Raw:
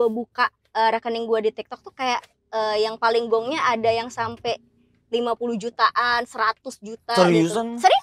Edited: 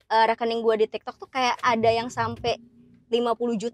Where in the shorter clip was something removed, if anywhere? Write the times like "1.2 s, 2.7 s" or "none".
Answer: 1.6 s